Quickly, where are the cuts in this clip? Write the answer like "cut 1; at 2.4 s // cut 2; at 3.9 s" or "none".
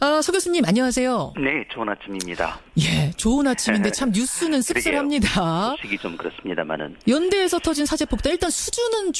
none